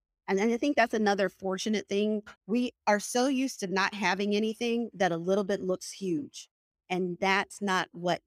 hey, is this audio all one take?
no; 1 cut; at 2.3 s

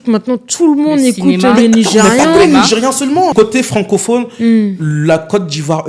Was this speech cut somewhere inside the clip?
yes; 1 cut; at 3.3 s

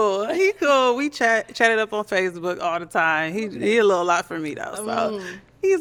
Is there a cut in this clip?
no; 0 cuts

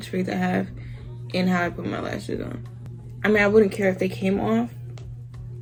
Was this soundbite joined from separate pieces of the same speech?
no; 0 cuts

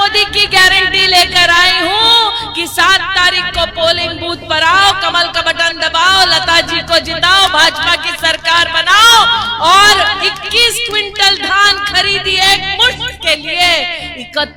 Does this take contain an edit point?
no; 0 cuts

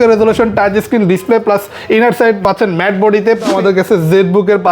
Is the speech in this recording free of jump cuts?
no; 1 cut; at 3.5 s

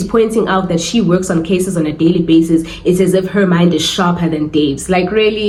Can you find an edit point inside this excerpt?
no; 0 cuts

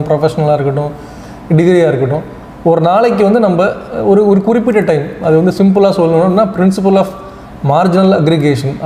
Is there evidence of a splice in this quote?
no; 0 cuts

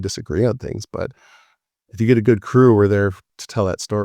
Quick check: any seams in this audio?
no; 0 cuts

